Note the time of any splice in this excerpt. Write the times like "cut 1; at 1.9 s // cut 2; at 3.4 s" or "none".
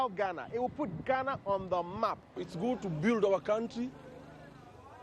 cut 1; at 2.4 s

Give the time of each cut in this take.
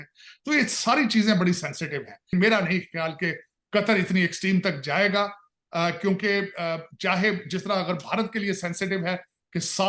cut 1; at 2.3 s

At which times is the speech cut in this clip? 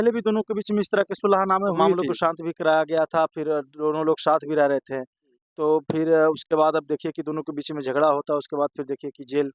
cut 1; at 2.0 s

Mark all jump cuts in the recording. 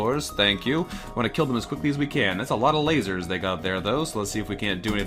cut 1; at 1.0 s

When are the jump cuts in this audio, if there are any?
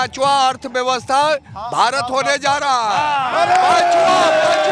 none

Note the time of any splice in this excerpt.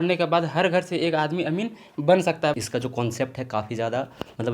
cut 1; at 2.6 s

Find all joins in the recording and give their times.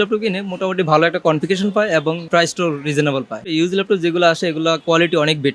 cut 1; at 2.2 s // cut 2; at 3.5 s // cut 3; at 4.8 s

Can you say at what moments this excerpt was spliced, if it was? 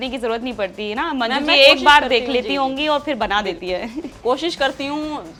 none

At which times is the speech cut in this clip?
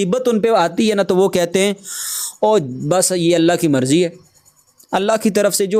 none

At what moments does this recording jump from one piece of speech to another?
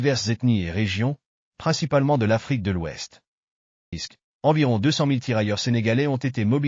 cut 1; at 4.0 s

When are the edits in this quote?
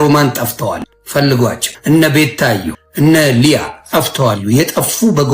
cut 1; at 0.9 s // cut 2; at 1.7 s // cut 3; at 2.8 s

